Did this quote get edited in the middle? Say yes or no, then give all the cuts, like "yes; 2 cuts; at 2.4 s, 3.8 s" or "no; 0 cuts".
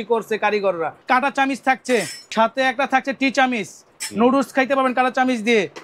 yes; 2 cuts; at 1.0 s, 2.2 s